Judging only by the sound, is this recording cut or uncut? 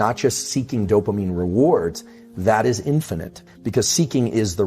cut